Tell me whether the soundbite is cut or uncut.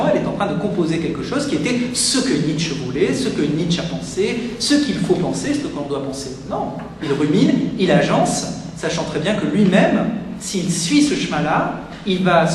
uncut